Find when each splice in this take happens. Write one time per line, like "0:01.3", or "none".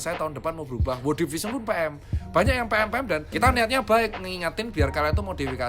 0:03.3